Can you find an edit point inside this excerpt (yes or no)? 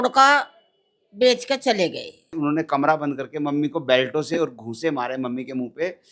yes